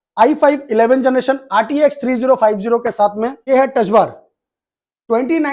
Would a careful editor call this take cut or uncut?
cut